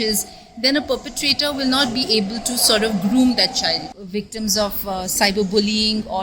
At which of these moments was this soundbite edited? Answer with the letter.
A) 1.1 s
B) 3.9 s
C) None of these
B